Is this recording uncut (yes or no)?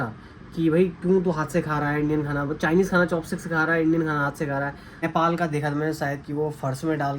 no